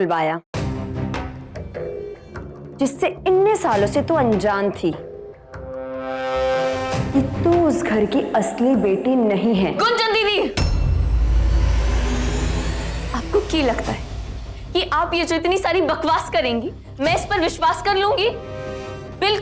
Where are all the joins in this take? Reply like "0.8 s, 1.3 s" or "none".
none